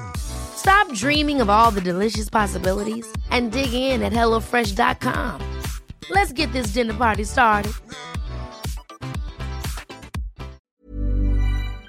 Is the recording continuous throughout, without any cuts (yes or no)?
no